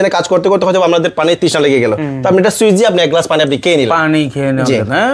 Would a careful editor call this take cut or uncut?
uncut